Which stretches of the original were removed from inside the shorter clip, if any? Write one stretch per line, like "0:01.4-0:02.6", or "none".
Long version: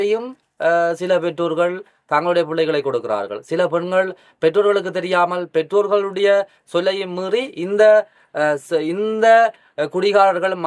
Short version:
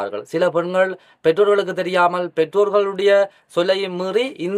none